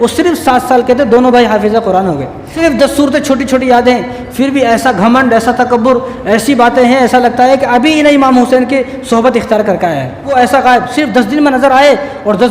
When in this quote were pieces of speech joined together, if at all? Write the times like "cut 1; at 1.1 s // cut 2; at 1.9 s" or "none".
cut 1; at 2.4 s // cut 2; at 10.3 s